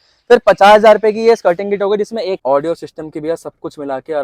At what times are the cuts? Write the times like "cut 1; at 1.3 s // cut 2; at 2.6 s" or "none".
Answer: cut 1; at 2.4 s

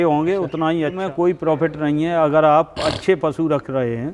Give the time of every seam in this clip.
cut 1; at 1.0 s

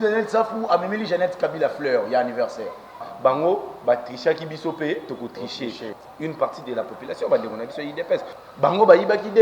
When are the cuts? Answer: cut 1; at 3.1 s // cut 2; at 5.9 s // cut 3; at 8.4 s

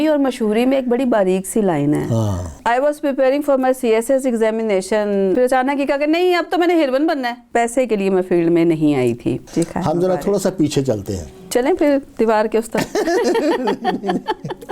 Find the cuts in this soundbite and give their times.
cut 1; at 2.5 s // cut 2; at 5.3 s // cut 3; at 7.4 s // cut 4; at 9.4 s // cut 5; at 11.4 s

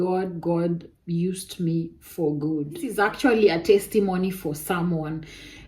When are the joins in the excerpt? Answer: cut 1; at 3.0 s

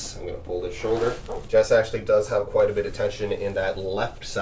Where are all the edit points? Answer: cut 1; at 1.3 s

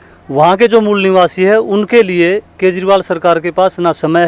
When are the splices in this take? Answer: none

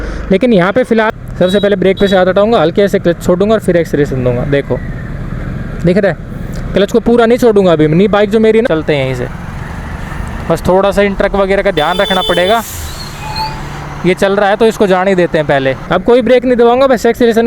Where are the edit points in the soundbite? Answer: cut 1; at 1.1 s // cut 2; at 8.6 s // cut 3; at 15.8 s

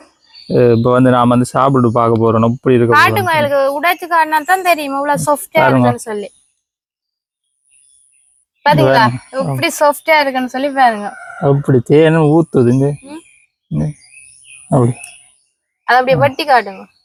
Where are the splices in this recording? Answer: none

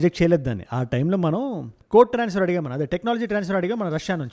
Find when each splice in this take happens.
none

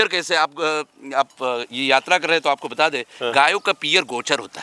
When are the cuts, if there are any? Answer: none

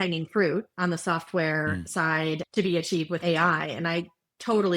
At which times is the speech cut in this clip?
cut 1; at 2.4 s // cut 2; at 3.2 s

